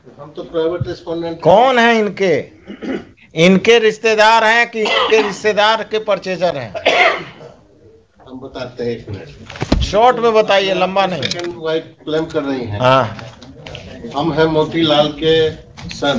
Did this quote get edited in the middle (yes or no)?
no